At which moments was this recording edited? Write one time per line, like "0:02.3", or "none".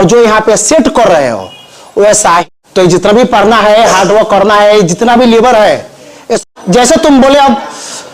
0:02.4
0:06.4